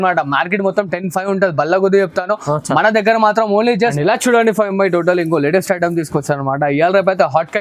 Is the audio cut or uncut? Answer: cut